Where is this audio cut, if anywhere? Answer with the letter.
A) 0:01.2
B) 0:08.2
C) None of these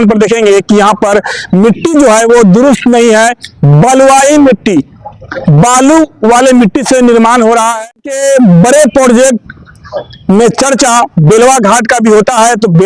B